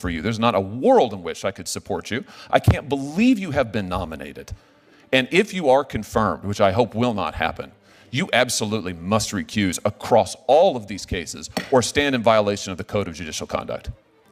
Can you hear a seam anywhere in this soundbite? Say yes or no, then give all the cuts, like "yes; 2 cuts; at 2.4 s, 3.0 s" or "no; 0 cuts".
no; 0 cuts